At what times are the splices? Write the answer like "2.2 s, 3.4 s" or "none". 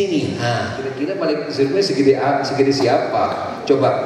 1.0 s